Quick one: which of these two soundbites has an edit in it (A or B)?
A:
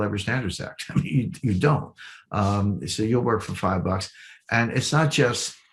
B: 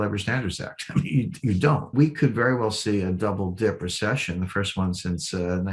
B